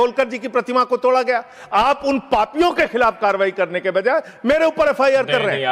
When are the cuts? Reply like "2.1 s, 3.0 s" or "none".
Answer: none